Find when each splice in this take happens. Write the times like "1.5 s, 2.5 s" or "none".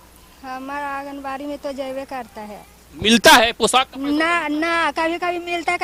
none